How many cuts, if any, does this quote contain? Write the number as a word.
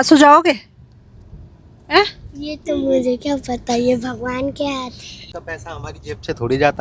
one